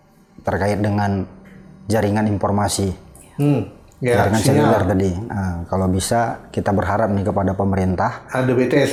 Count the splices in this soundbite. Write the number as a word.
zero